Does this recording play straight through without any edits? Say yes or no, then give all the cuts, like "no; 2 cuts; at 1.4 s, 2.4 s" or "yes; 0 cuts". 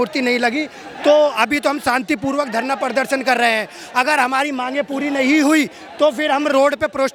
yes; 0 cuts